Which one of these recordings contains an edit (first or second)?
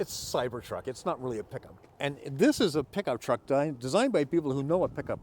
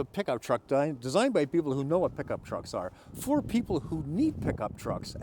first